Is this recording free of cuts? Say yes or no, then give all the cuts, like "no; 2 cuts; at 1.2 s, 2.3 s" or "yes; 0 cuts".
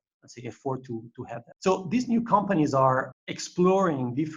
no; 2 cuts; at 1.5 s, 3.2 s